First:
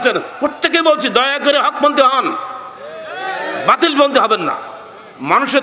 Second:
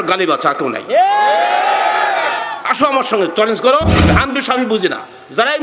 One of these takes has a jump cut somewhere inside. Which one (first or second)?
second